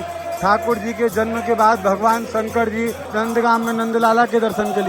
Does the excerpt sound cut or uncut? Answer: cut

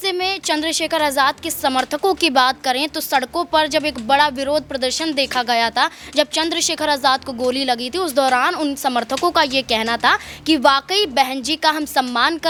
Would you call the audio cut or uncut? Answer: uncut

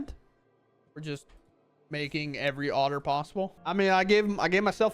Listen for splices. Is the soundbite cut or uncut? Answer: cut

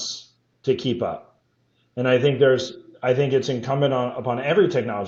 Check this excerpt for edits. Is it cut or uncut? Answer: uncut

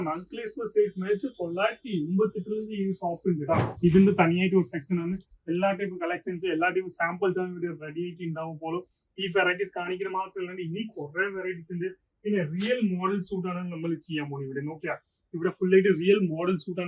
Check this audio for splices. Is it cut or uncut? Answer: cut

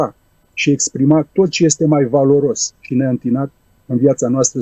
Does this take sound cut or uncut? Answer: uncut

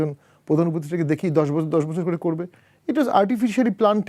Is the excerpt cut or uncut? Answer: uncut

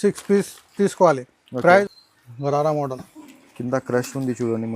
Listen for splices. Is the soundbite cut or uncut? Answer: cut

